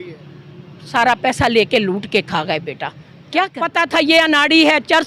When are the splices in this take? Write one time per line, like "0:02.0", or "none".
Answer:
0:03.6